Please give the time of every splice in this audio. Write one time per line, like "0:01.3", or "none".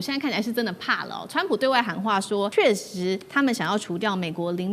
0:02.5